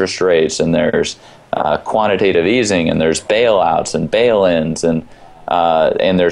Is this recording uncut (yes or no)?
yes